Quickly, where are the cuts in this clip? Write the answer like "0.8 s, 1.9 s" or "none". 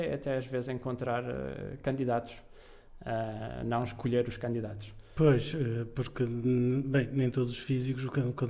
none